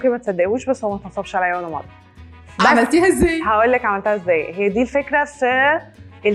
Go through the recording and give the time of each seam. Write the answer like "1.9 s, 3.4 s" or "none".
none